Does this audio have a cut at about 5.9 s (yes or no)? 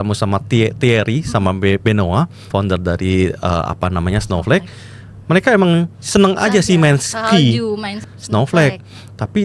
no